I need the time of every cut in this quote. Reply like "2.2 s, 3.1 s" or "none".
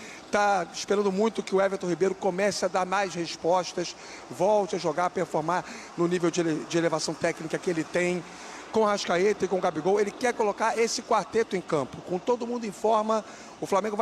none